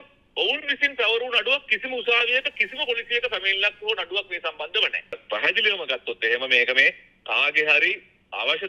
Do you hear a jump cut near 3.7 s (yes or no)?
no